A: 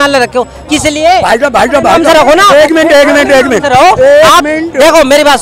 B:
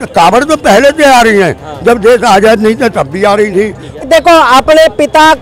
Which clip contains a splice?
B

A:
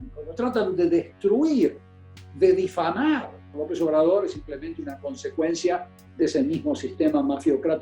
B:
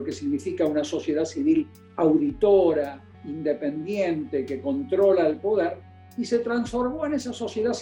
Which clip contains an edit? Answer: A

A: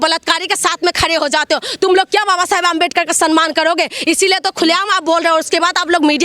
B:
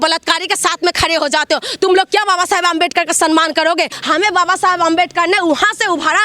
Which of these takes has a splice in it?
B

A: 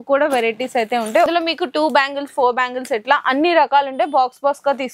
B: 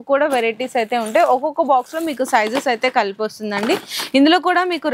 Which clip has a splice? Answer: A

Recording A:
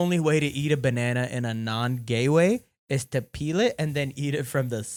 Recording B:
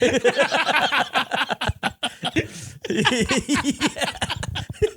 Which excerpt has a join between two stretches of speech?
B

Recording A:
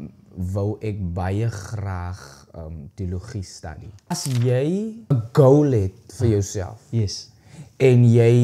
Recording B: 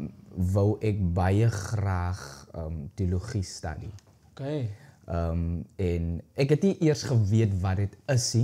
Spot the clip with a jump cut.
A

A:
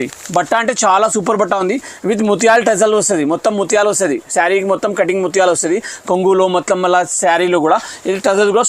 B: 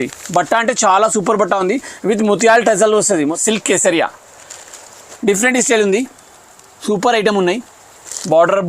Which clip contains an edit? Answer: B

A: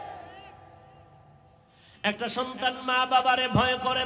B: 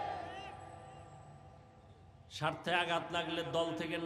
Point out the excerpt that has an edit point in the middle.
A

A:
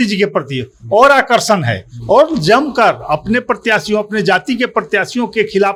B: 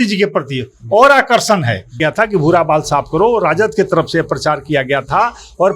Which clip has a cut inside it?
B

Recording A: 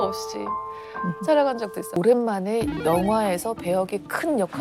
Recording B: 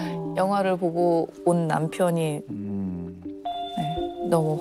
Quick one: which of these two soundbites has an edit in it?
A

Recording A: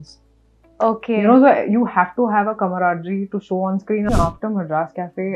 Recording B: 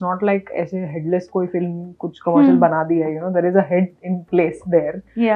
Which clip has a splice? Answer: A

